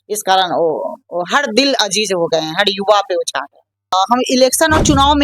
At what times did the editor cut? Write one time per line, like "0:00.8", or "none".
0:03.9

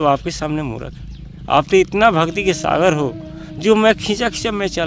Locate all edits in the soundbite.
none

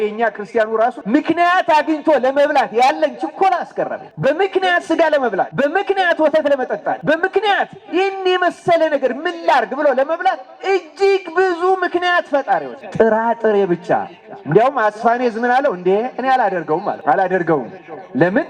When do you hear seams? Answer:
0:01.0
0:04.0
0:05.5
0:07.0
0:12.8
0:17.0

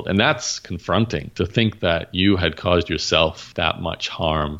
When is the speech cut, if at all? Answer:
0:03.4

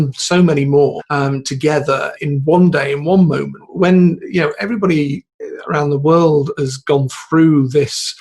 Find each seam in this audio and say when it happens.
0:01.0
0:02.1
0:03.6

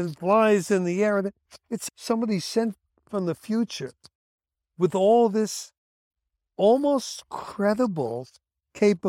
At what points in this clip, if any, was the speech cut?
0:01.7

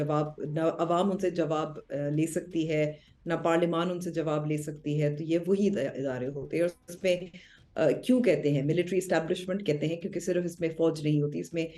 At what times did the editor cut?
none

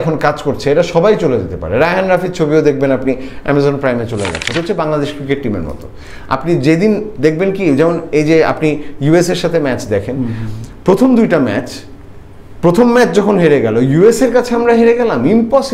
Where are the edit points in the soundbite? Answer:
0:04.4

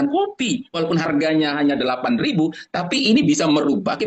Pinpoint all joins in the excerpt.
none

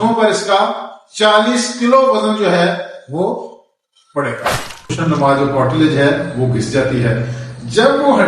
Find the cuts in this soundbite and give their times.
0:05.0

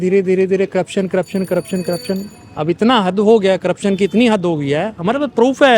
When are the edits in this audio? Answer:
none

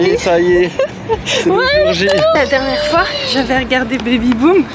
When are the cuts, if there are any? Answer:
0:02.3

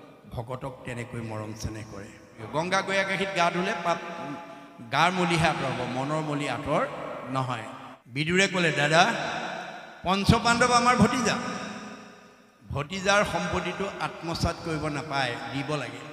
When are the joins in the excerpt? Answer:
0:02.4
0:07.9

